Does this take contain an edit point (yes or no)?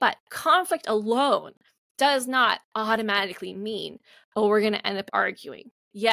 no